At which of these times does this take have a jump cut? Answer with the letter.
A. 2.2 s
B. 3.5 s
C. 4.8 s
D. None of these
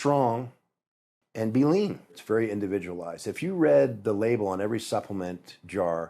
A